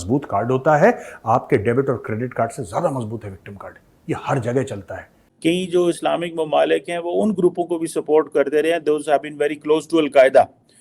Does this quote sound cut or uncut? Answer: cut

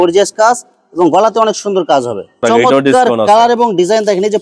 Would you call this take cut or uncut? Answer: cut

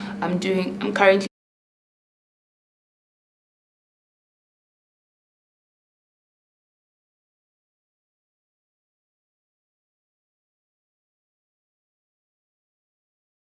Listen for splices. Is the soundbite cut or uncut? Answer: uncut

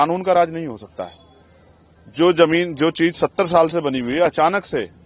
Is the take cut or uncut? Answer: uncut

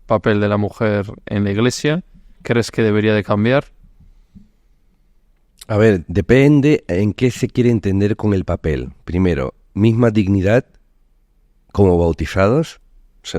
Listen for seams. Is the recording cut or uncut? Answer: uncut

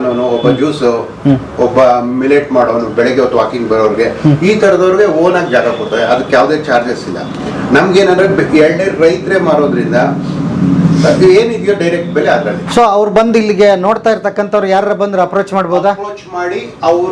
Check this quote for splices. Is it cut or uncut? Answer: uncut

